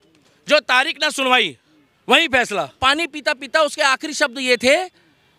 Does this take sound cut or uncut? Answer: cut